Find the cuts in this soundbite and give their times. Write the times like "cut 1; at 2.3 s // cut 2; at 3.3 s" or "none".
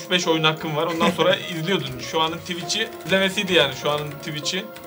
cut 1; at 3.0 s